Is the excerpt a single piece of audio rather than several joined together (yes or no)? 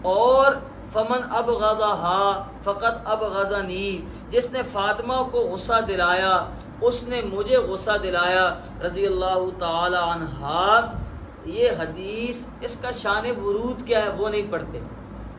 yes